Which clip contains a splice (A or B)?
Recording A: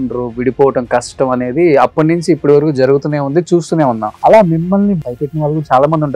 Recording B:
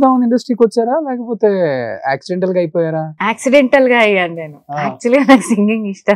A